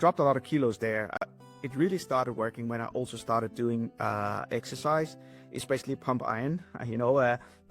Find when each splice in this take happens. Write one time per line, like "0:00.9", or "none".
0:01.2